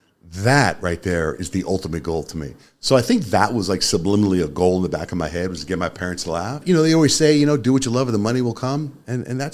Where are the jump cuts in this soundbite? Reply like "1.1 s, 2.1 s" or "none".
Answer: 6.6 s